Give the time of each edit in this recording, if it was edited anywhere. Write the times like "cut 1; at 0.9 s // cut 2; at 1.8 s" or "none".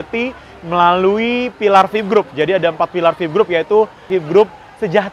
cut 1; at 4.0 s